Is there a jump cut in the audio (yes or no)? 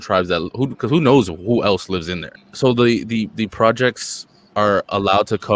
yes